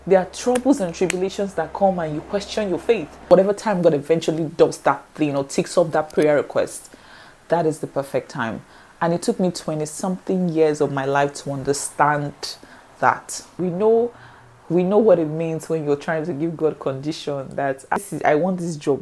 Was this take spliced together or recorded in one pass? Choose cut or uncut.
cut